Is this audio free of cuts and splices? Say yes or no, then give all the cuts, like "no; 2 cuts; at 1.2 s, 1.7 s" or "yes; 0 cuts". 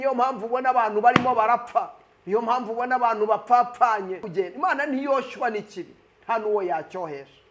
no; 1 cut; at 4.2 s